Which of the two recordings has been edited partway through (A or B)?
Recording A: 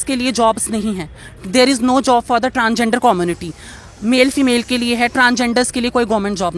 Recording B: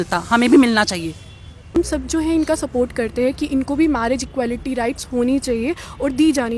B